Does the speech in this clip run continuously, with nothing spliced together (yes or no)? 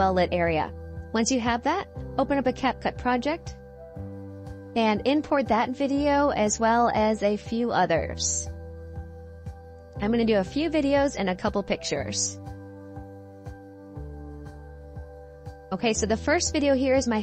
no